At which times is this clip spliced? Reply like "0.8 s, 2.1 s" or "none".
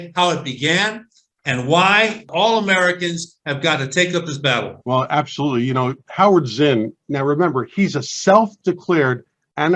2.2 s, 4.8 s

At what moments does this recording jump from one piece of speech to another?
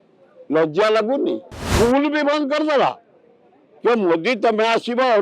1.6 s

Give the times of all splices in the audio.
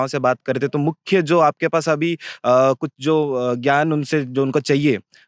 none

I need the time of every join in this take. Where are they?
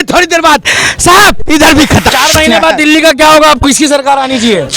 2.1 s

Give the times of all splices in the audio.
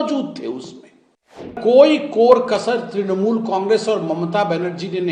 1.6 s

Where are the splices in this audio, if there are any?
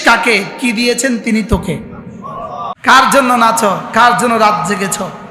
2.7 s

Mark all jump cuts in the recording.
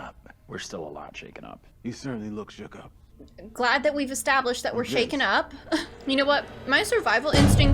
1.7 s, 5.9 s

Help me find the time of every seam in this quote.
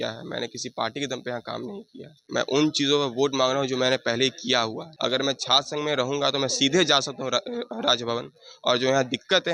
2.2 s, 4.8 s

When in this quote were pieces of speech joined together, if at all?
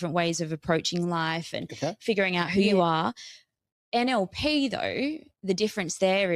none

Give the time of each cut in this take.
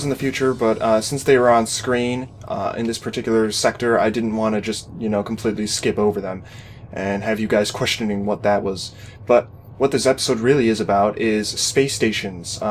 1.0 s

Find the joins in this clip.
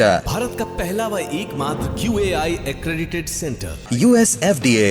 none

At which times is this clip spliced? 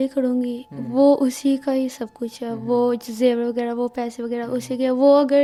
none

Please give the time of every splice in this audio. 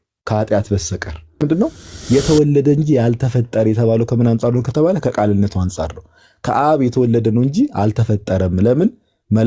1.4 s

